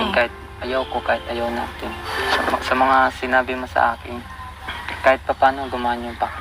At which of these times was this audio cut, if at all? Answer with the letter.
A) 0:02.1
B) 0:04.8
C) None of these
A